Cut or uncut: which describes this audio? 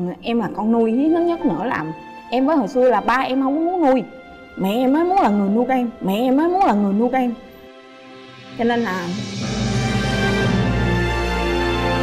uncut